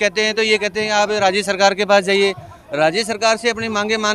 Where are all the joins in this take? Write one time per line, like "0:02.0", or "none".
none